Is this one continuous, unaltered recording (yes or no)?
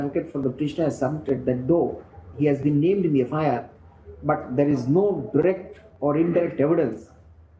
yes